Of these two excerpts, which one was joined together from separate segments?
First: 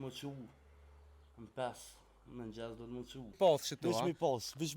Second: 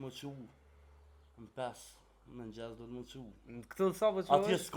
first; 1 cut; at 3.3 s

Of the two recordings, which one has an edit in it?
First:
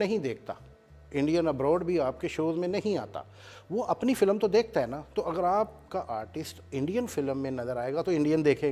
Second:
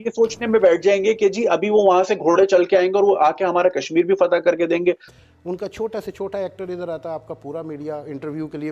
second; 1 cut; at 5.1 s

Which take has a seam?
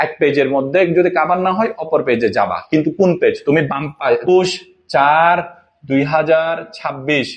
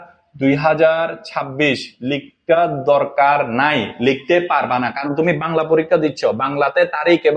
first; 1 cut; at 4.3 s

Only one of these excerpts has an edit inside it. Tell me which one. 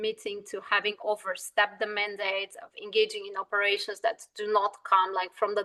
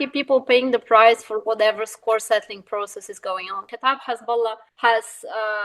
second; 2 cuts; at 3.7 s, 4.7 s

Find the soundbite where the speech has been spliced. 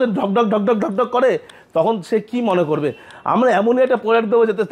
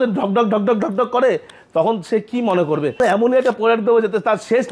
second; 1 cut; at 3.0 s

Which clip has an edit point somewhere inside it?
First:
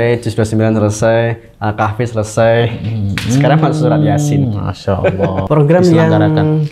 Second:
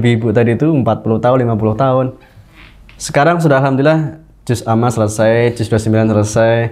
first; 1 cut; at 5.5 s

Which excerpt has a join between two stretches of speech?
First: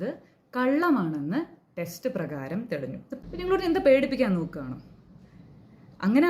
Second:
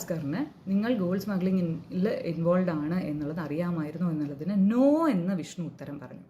first; 1 cut; at 3.2 s

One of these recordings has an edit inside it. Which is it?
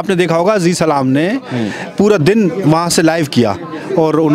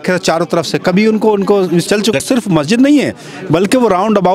second; 1 cut; at 2.0 s

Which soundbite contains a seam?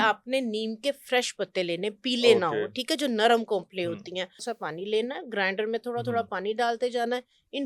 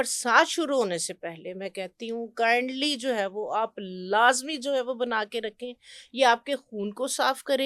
first; 1 cut; at 4.4 s

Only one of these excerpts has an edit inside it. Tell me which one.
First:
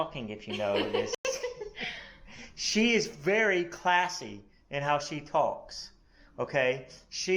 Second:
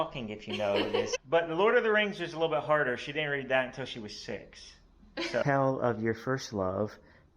second; 2 cuts; at 1.2 s, 5.4 s

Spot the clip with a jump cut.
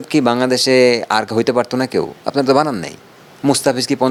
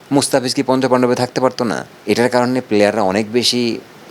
second; 1 cut; at 1.9 s

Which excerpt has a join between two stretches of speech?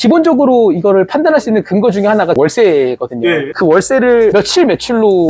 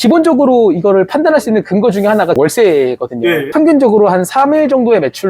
second; 1 cut; at 3.5 s

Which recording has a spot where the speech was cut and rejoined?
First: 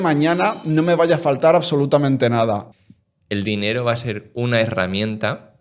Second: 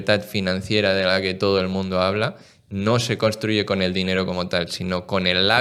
first; 1 cut; at 2.7 s

